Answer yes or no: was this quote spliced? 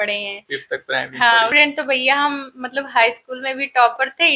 yes